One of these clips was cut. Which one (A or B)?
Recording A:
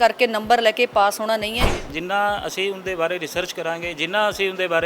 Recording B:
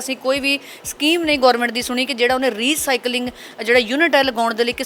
A